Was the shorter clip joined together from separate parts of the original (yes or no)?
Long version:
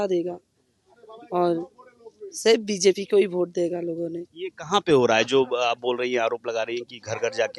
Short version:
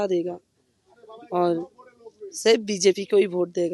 no